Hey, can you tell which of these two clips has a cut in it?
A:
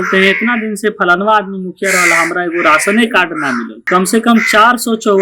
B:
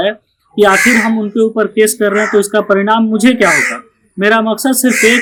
A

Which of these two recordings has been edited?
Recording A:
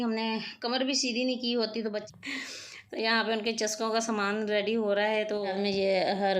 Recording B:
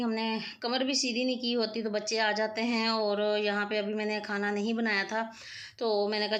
A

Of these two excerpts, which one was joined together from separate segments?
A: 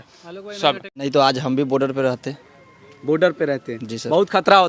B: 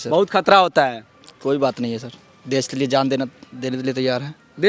A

